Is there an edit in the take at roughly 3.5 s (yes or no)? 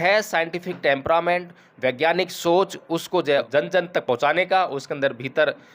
yes